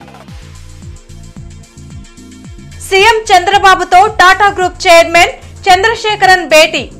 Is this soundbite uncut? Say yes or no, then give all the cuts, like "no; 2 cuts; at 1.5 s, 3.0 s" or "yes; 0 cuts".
no; 1 cut; at 1.4 s